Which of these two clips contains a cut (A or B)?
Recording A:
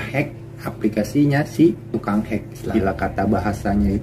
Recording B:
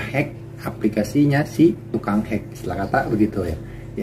A